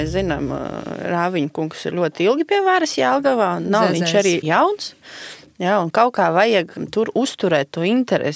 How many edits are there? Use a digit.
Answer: 2